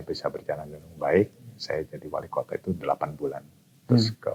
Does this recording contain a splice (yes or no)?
no